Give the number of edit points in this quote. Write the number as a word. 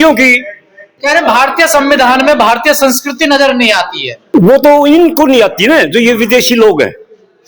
one